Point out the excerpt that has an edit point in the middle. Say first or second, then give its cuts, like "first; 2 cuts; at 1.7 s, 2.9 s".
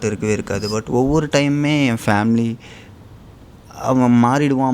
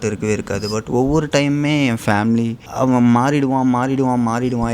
second; 1 cut; at 2.6 s